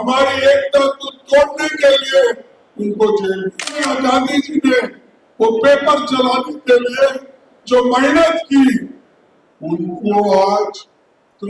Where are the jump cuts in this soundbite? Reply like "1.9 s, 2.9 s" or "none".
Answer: 3.8 s